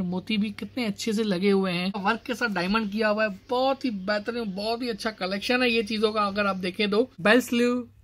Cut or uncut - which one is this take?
cut